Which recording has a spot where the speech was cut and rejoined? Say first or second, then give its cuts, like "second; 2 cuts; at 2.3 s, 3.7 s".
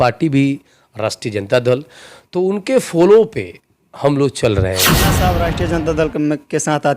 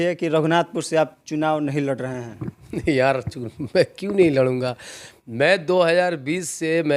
first; 1 cut; at 5.2 s